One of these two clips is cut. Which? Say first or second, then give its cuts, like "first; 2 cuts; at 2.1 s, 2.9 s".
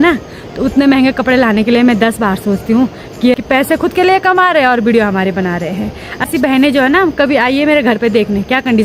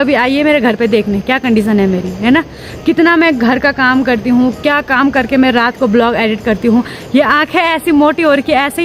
first; 2 cuts; at 3.3 s, 6.2 s